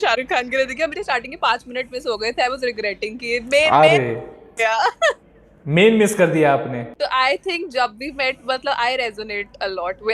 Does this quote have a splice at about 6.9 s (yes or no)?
yes